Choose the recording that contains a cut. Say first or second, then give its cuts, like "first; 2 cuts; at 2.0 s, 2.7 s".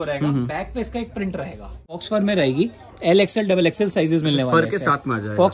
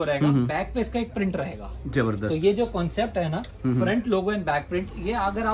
first; 1 cut; at 2.0 s